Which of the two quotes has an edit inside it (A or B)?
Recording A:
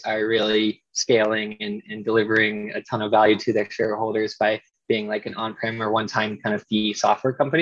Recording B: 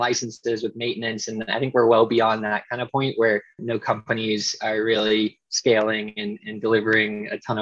B